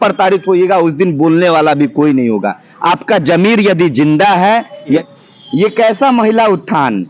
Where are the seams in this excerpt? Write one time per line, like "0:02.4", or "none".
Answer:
0:05.0

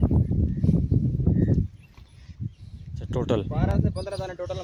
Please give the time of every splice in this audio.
0:03.0

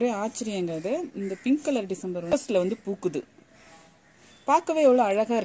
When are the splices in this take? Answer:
0:02.3

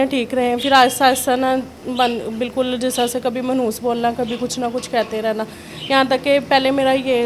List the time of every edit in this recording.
none

